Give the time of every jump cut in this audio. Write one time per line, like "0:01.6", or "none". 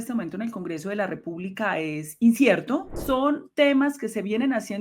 0:02.9